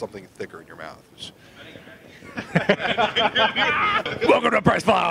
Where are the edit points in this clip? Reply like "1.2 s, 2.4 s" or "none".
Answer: 4.1 s

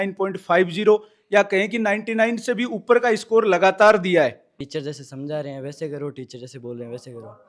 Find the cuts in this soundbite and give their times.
4.5 s

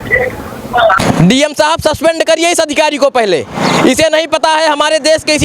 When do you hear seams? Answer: 1.0 s

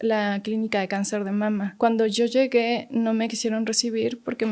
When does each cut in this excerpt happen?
1.7 s

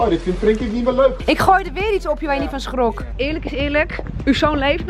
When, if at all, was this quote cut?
1.2 s, 3.1 s

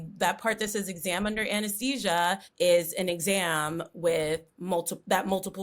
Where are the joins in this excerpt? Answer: 2.5 s

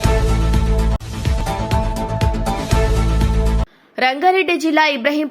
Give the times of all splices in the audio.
1.0 s, 3.7 s

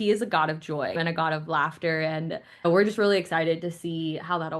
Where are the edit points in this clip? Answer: 0.9 s, 2.6 s

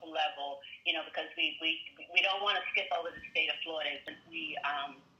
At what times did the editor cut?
4.0 s

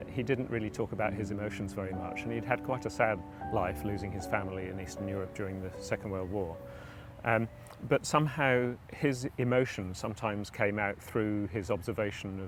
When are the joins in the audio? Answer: none

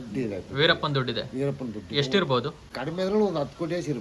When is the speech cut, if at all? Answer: 2.7 s

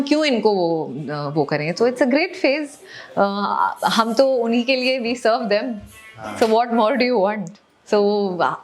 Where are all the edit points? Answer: none

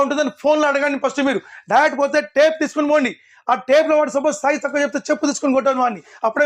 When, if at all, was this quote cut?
none

